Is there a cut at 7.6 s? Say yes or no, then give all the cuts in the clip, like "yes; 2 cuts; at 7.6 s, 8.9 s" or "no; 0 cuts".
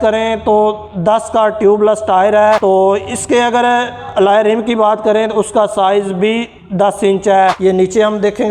yes; 1 cut; at 7.6 s